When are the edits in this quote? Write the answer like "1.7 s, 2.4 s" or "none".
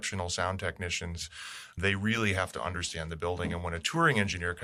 none